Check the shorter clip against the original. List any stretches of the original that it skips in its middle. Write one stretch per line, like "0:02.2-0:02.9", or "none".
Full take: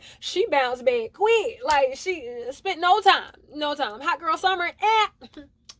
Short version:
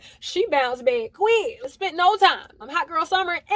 0:01.5-0:02.4
0:03.5-0:04.0